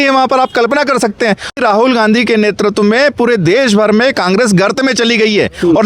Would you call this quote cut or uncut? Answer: cut